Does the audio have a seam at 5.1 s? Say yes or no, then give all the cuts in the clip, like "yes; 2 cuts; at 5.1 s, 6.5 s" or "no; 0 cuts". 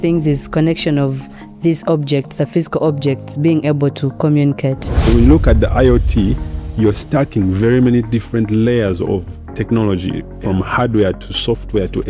yes; 1 cut; at 5.1 s